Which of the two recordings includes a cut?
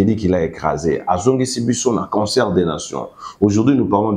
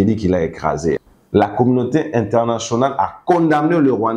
second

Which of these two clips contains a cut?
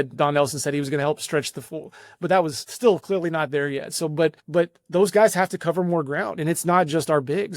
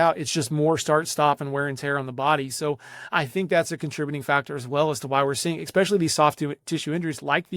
first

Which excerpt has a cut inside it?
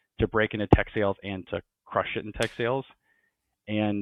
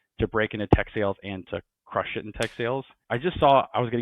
second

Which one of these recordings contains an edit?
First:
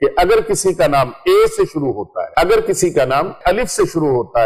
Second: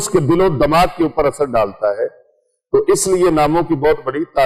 first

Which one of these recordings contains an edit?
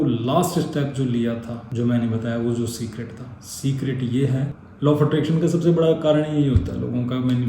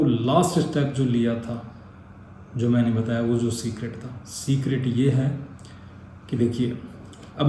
first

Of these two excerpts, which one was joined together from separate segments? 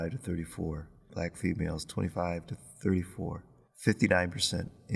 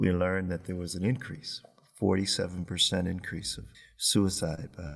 first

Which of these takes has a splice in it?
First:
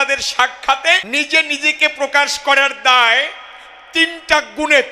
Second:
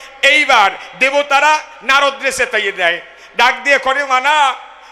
first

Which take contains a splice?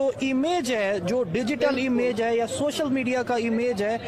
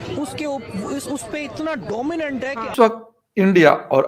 second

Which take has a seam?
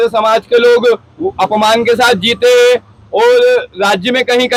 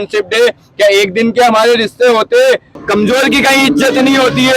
second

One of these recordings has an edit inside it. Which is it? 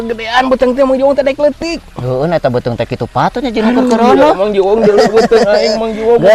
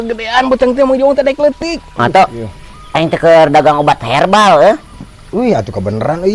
second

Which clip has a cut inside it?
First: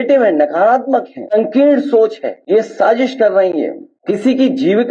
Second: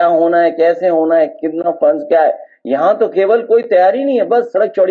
first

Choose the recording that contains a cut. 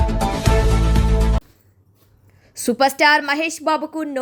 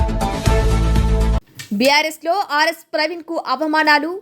second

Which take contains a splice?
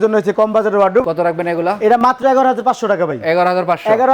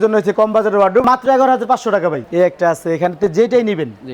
second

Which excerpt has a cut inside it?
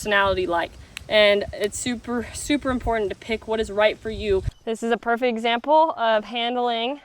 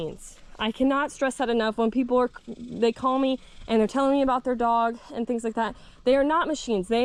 first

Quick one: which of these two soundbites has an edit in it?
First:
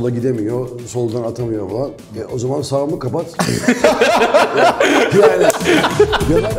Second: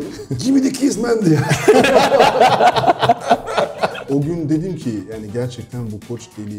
second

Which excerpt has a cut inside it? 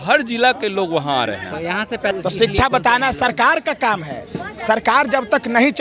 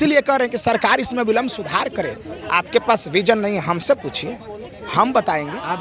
first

